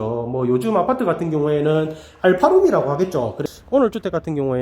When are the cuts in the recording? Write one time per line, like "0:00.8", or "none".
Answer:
0:03.4